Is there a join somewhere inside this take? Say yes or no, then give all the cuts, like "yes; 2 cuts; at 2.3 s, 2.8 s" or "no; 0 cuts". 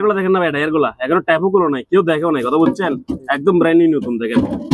no; 0 cuts